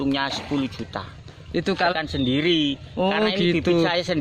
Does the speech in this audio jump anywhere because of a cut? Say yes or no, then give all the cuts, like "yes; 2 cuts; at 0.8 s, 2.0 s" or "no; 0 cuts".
yes; 1 cut; at 1.9 s